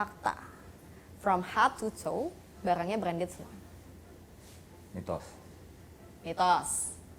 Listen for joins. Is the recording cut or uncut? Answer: uncut